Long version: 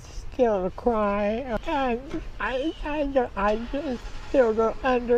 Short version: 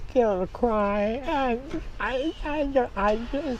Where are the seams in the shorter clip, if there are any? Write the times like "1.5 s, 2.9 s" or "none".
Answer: 1.2 s